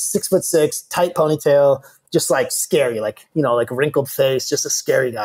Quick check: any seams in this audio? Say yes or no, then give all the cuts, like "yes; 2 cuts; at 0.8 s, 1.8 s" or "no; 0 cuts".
no; 0 cuts